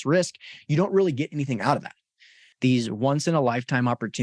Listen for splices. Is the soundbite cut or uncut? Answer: cut